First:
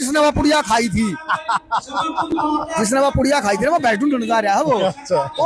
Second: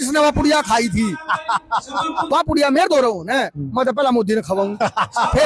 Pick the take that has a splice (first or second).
second